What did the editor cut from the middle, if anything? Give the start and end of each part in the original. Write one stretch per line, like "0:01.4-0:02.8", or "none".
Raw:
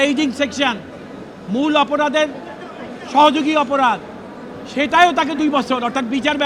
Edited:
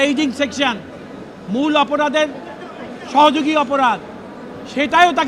none